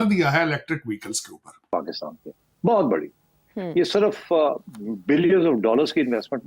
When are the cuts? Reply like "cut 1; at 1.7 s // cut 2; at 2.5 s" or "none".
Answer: cut 1; at 1.5 s